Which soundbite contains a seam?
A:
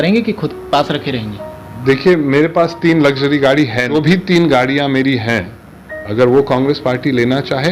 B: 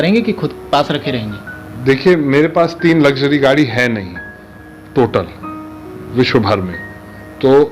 A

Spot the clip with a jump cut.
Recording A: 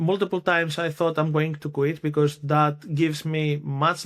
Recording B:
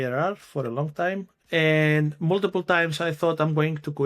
B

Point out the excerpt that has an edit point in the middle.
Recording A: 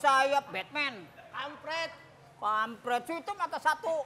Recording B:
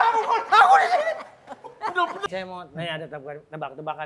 B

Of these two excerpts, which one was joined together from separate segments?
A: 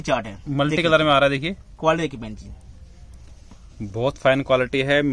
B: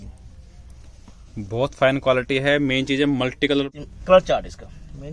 B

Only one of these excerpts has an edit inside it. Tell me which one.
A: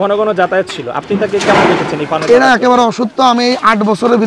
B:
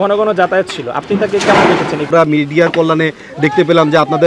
B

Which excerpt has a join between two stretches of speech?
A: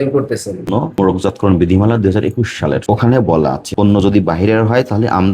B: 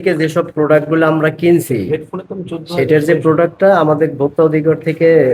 A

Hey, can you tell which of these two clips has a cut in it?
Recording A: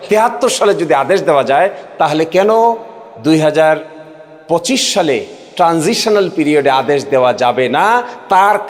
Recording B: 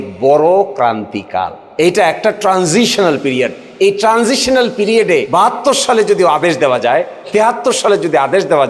B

